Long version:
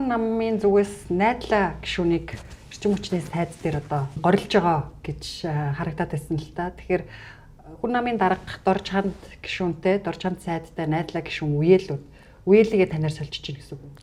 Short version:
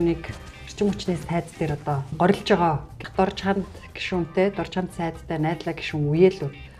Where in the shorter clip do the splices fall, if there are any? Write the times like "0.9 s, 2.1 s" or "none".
3.0 s